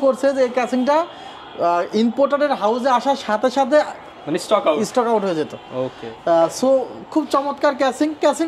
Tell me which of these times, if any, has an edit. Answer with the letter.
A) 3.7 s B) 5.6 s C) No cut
C